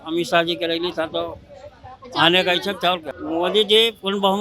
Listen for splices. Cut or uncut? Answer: cut